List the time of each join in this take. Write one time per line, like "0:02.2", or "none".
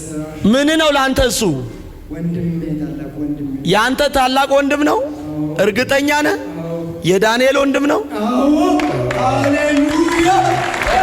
none